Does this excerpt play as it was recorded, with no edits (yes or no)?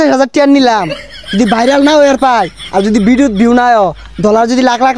yes